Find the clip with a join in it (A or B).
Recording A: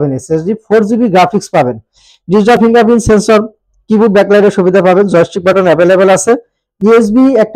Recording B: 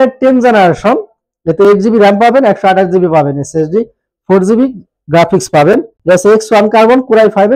B